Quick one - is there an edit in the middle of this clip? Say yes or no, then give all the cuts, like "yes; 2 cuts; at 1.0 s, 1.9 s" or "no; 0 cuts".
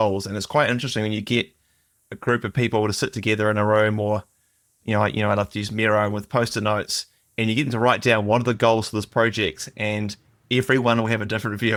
no; 0 cuts